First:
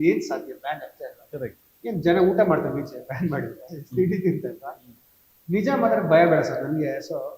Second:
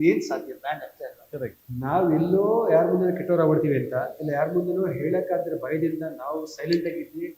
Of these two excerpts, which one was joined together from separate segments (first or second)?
second